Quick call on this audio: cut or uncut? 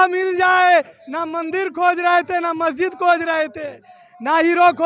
uncut